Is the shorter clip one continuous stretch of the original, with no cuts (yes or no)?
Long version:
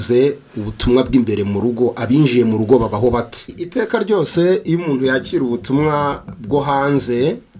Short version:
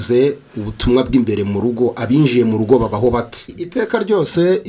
yes